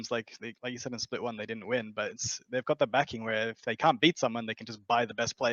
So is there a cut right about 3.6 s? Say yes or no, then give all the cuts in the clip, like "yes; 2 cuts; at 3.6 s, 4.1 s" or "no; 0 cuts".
no; 0 cuts